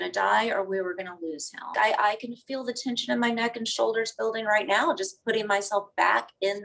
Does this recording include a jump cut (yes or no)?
yes